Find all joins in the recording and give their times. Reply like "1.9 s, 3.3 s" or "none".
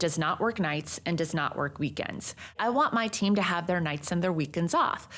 2.6 s